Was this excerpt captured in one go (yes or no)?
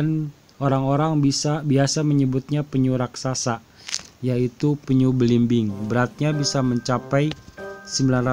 yes